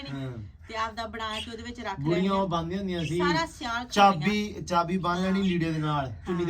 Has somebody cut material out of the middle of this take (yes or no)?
no